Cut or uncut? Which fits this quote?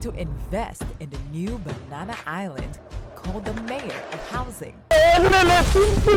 uncut